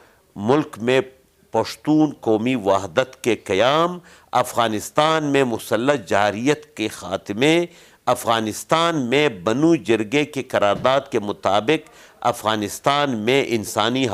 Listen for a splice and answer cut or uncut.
uncut